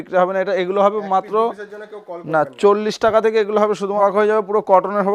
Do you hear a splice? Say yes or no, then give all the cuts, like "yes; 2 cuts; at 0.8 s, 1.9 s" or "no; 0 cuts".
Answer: yes; 1 cut; at 4.0 s